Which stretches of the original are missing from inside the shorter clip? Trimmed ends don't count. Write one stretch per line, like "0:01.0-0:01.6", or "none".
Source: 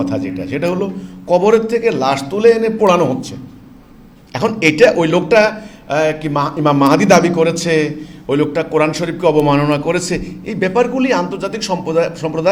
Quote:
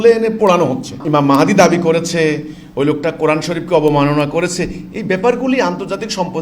0:03.4-0:06.5